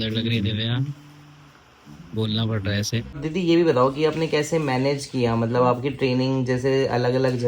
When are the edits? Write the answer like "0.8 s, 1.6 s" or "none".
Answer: 3.1 s